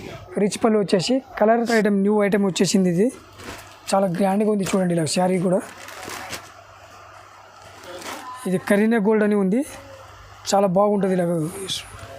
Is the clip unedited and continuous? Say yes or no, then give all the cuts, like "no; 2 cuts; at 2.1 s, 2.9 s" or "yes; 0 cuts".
no; 1 cut; at 1.7 s